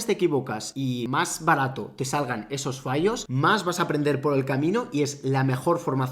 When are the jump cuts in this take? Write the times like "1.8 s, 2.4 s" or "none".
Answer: 0.9 s, 3.3 s